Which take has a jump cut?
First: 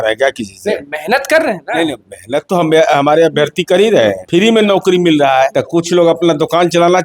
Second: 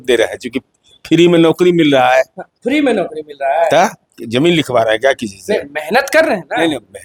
first; 2 cuts; at 4.2 s, 5.6 s

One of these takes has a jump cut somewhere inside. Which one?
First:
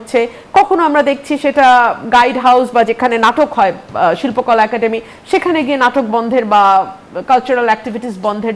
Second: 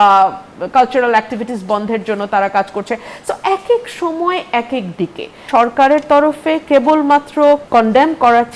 second; 2 cuts; at 5.4 s, 7.6 s

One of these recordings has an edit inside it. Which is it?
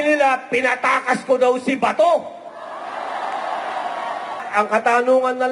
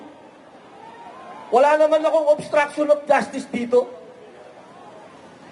first; 1 cut; at 4.4 s

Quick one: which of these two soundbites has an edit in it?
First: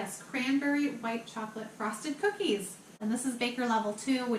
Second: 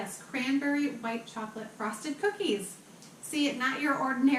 first; 1 cut; at 3.0 s

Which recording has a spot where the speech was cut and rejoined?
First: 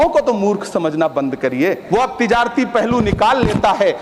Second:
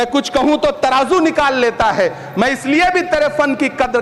first; 1 cut; at 1.8 s

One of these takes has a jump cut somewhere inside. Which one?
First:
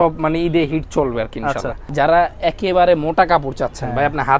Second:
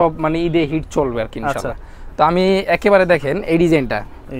first; 1 cut; at 1.8 s

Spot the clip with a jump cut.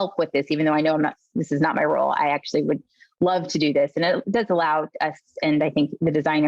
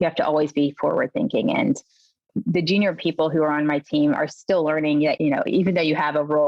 second; 2 cuts; at 2.2 s, 5.2 s

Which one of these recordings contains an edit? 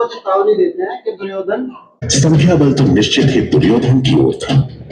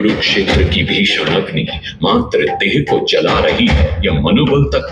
first; 1 cut; at 2.0 s

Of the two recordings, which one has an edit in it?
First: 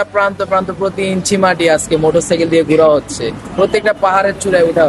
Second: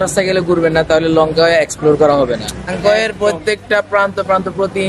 second; 1 cut; at 2.7 s

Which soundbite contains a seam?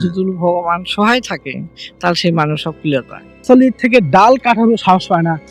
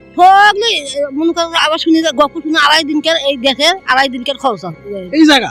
first; 1 cut; at 3.4 s

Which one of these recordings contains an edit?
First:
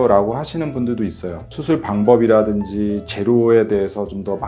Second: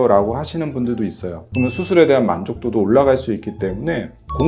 second; 1 cut; at 1.4 s

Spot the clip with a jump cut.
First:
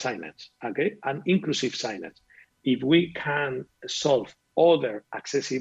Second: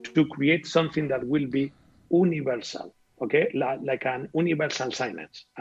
first; 1 cut; at 2.4 s

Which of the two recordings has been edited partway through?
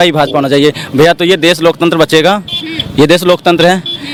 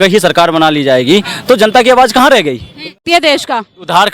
second; 1 cut; at 3.0 s

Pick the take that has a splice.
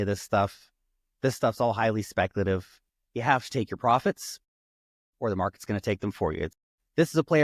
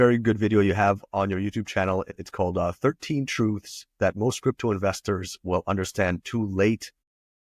first; 2 cuts; at 2.7 s, 6.6 s

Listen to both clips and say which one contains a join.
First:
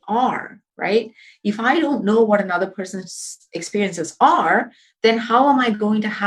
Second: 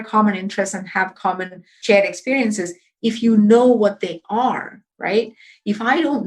second; 1 cut; at 1.7 s

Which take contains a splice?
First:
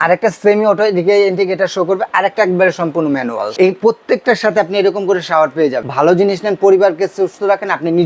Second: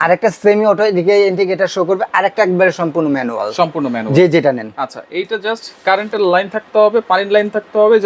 first; 2 cuts; at 3.5 s, 5.8 s

